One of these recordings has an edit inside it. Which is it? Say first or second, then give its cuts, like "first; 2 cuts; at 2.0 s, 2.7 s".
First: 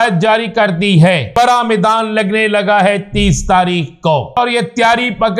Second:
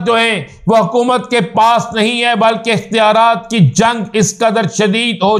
first; 2 cuts; at 1.3 s, 4.4 s